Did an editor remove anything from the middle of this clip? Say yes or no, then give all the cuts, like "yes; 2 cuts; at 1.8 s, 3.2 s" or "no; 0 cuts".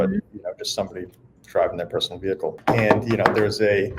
yes; 1 cut; at 2.6 s